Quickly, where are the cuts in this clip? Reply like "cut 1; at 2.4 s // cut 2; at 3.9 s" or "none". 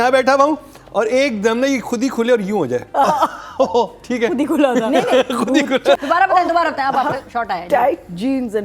cut 1; at 6.0 s